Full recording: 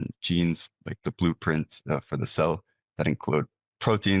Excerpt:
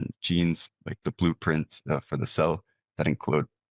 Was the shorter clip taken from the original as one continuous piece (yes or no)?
yes